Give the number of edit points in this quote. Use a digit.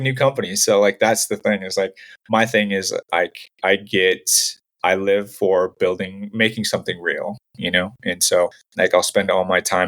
1